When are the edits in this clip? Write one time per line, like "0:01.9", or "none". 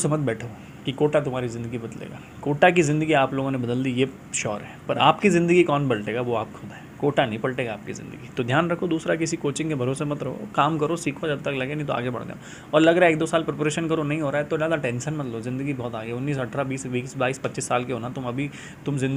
none